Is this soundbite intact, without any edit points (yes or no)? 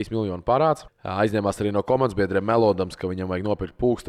no